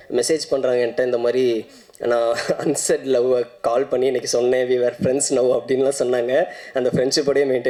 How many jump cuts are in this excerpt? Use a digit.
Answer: 0